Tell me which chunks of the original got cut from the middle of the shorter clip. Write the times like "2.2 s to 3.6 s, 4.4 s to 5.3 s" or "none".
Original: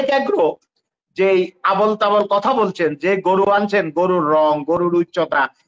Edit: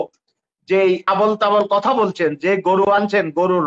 1.5 s to 1.6 s